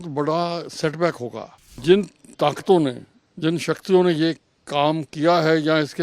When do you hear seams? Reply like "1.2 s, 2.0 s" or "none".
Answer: 1.8 s